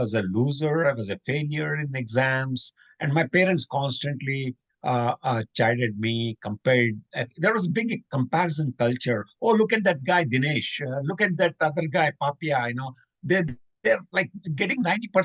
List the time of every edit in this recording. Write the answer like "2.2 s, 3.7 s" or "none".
none

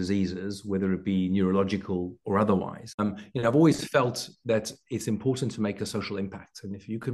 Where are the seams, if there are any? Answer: 2.8 s

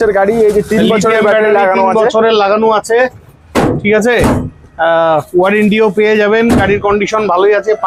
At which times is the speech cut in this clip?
none

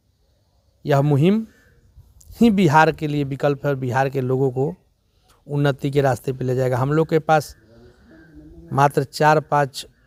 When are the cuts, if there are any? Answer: none

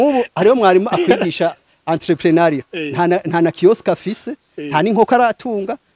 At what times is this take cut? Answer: none

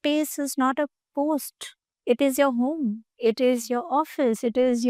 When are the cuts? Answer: none

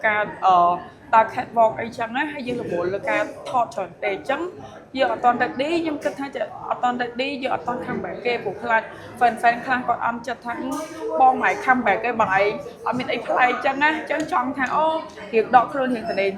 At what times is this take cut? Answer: none

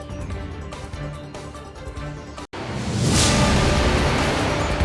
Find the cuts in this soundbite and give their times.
2.5 s

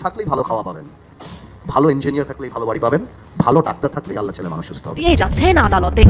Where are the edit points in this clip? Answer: 5.0 s

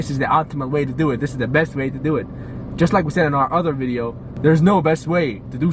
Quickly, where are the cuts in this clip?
4.2 s

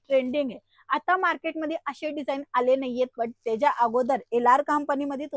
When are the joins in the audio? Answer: none

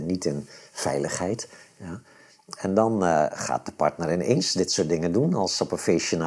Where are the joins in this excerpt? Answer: none

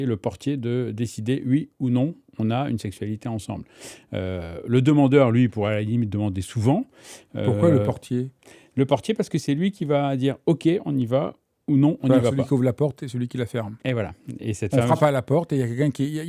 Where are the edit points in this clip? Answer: none

